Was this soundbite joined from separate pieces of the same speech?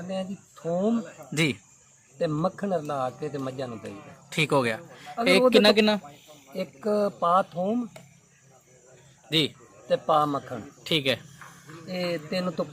no; 0 cuts

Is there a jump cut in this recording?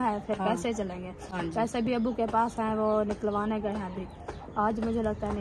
no; 0 cuts

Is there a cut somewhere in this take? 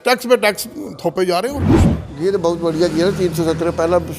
yes; 1 cut; at 1.7 s

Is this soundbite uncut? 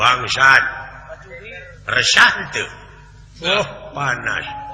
yes; 0 cuts

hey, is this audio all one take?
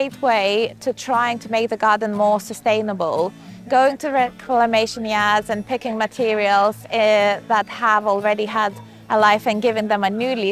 yes; 0 cuts

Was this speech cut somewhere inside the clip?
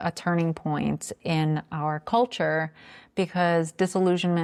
no; 0 cuts

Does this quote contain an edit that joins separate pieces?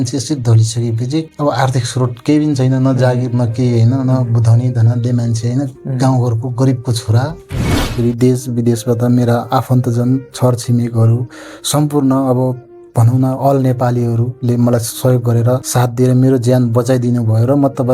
yes; 2 cuts; at 1.3 s, 7.8 s

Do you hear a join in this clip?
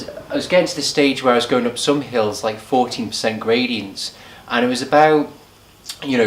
no; 0 cuts

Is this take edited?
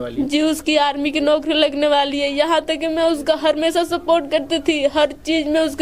no; 0 cuts

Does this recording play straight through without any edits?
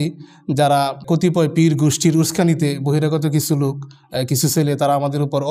no; 1 cut; at 1.0 s

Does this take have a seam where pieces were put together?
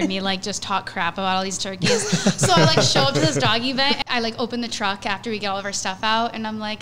yes; 1 cut; at 4.0 s

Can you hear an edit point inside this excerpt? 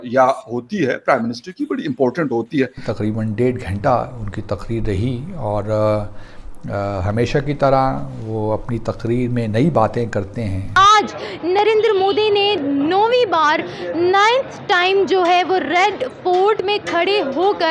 yes; 2 cuts; at 2.8 s, 10.6 s

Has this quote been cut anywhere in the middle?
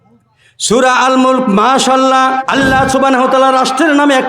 yes; 1 cut; at 2.4 s

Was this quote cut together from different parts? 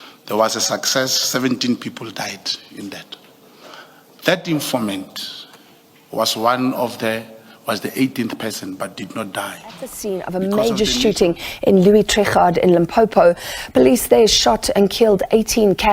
yes; 1 cut; at 10.0 s

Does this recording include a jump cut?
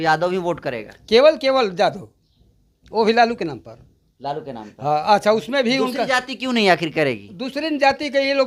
no; 0 cuts

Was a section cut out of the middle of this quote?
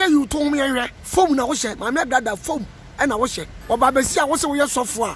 yes; 2 cuts; at 1.0 s, 3.5 s

